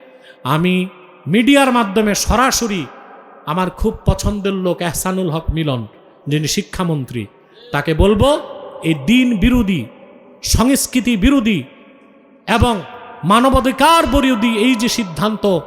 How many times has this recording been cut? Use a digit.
0